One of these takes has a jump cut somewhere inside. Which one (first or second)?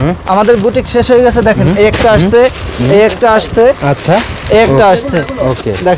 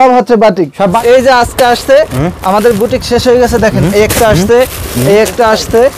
second